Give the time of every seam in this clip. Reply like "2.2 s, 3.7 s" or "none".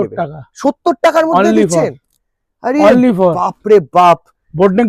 none